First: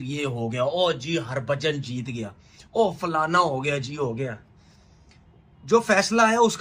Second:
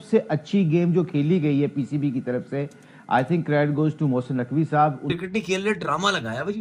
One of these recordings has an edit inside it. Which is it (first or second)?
second